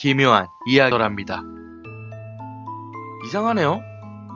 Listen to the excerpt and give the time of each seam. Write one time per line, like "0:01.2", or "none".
none

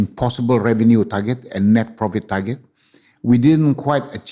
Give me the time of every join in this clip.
none

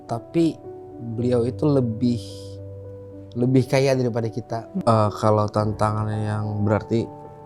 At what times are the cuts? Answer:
0:04.7

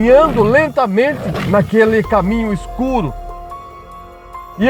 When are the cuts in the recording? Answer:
0:01.4

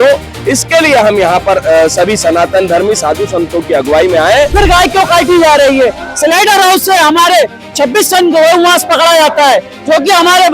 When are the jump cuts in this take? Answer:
0:04.5

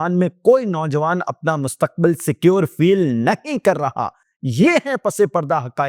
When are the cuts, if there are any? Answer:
none

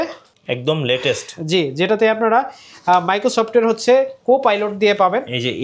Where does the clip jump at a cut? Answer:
none

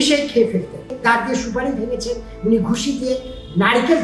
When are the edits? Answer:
0:01.0

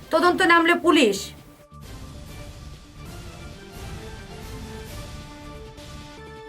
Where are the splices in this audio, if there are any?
0:01.4

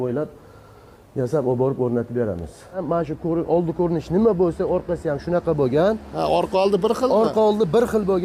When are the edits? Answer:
0:02.8

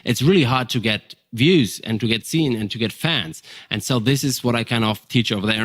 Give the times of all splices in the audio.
none

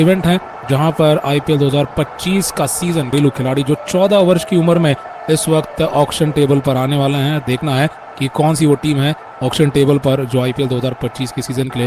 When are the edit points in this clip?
0:03.1

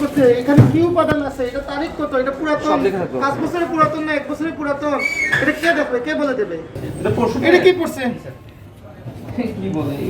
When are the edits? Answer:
0:06.8

